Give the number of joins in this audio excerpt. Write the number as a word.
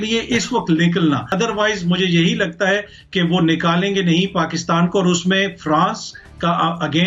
one